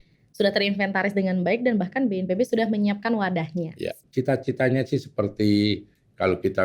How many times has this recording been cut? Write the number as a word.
one